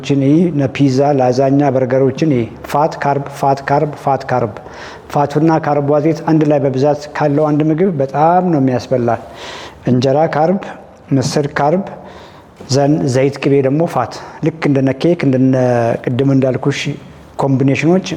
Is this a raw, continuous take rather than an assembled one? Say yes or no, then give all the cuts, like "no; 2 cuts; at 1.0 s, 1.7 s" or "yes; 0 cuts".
yes; 0 cuts